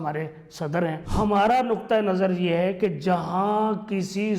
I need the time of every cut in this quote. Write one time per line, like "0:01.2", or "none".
0:01.0